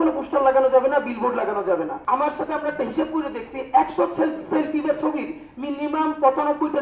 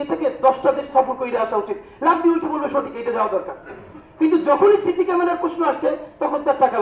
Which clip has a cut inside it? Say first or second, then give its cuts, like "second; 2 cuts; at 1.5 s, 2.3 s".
first; 1 cut; at 2.0 s